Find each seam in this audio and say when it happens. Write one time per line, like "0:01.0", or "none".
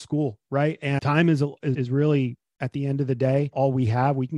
0:01.0
0:01.8